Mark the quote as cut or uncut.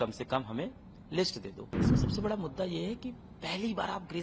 cut